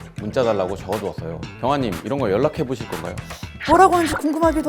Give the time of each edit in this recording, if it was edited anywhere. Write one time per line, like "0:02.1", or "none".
0:03.5